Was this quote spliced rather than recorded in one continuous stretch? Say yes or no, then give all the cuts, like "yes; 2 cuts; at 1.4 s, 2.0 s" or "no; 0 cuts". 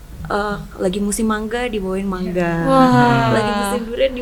no; 0 cuts